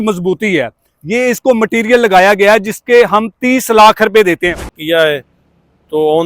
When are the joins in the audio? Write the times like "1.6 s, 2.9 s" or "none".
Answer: 4.8 s